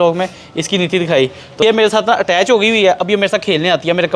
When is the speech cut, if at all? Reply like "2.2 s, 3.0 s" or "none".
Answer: 1.6 s